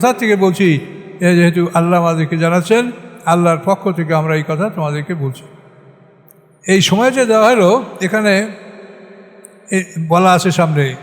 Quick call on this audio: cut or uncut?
cut